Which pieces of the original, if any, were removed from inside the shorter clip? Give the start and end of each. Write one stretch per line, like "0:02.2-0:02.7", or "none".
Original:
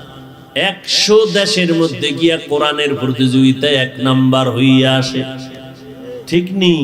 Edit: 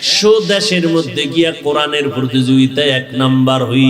none